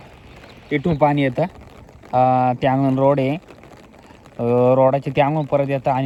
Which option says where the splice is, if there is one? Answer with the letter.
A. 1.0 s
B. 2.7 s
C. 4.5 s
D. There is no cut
D